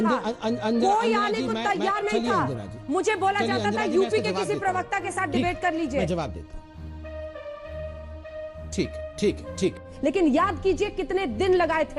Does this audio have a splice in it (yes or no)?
yes